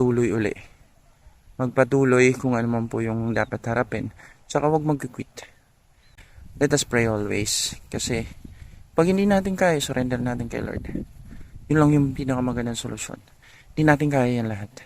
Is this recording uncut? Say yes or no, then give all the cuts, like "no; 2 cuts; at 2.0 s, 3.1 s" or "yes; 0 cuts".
no; 1 cut; at 6.1 s